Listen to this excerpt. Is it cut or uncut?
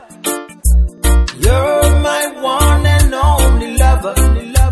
cut